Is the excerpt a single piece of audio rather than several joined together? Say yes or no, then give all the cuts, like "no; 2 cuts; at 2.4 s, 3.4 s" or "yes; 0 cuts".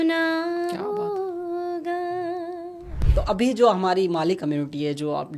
no; 1 cut; at 3.0 s